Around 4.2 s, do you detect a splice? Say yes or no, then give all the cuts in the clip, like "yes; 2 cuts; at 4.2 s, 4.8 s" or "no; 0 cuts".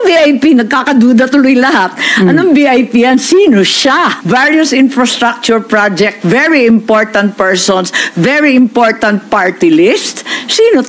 yes; 1 cut; at 4.2 s